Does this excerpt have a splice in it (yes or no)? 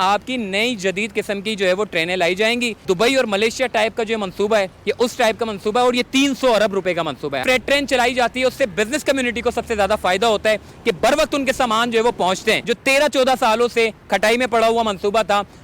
yes